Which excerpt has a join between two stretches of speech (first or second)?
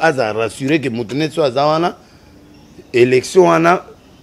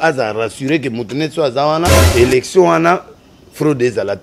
second